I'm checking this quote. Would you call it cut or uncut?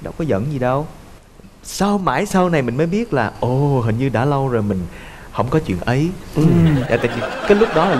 uncut